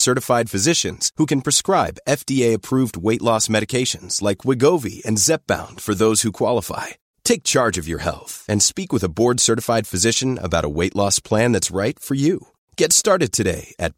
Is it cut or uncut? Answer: uncut